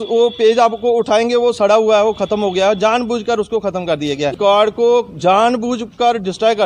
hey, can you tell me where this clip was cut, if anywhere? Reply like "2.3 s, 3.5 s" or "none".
4.3 s